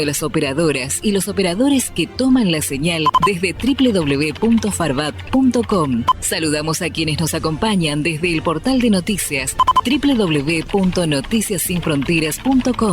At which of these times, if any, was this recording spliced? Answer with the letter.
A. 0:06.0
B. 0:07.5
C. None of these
A